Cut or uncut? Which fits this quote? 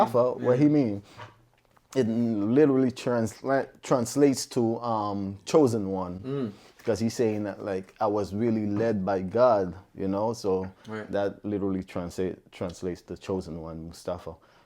uncut